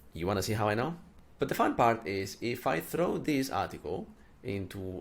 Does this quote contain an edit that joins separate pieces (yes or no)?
yes